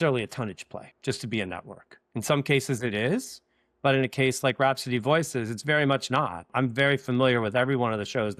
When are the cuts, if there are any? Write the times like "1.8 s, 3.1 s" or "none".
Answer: 0.9 s, 6.5 s